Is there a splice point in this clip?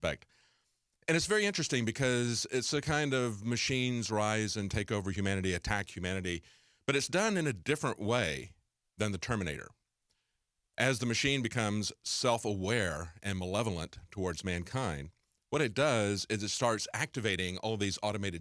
yes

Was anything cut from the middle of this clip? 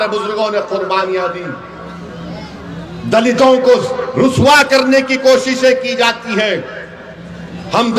no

